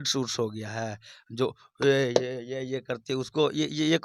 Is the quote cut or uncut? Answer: uncut